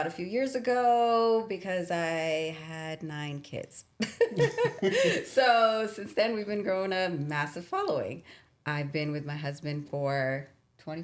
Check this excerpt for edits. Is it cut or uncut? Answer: uncut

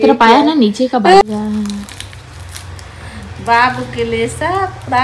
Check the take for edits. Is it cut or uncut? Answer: cut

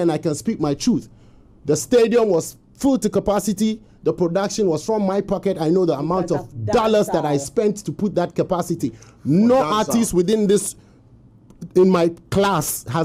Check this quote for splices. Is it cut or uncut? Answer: uncut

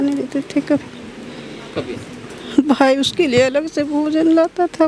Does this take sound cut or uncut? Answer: uncut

